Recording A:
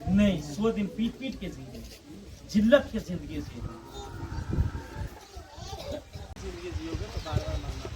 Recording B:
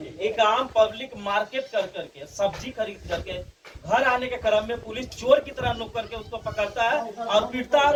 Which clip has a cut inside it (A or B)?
A